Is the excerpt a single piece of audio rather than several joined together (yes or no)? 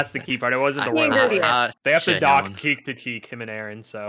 no